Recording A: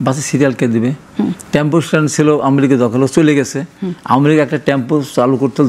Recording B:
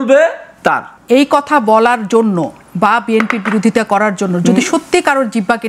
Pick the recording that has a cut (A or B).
B